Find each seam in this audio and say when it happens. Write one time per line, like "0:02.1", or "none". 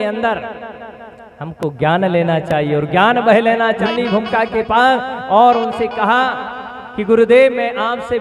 0:03.8